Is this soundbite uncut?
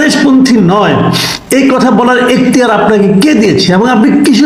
yes; 0 cuts

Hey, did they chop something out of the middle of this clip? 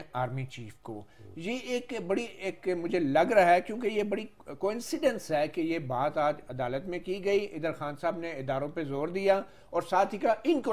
no; 0 cuts

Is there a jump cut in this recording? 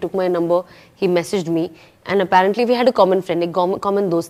no; 0 cuts

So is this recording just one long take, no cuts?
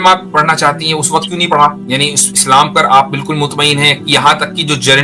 no; 1 cut; at 1.8 s

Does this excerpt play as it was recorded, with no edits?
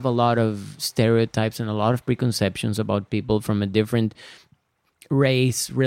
yes; 0 cuts

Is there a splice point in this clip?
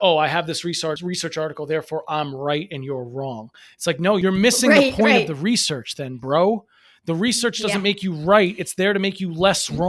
yes; 2 cuts; at 1.0 s, 4.2 s

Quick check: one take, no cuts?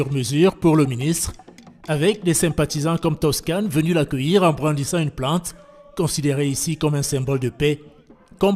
no; 1 cut; at 6.8 s

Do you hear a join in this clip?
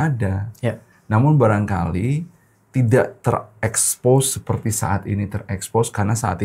no; 0 cuts

